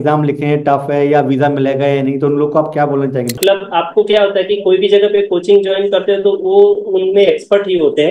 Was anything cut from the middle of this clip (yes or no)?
yes